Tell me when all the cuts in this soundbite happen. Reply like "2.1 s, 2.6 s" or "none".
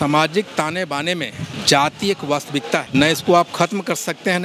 1.5 s, 2.9 s